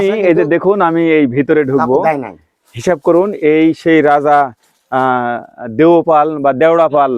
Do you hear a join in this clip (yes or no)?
no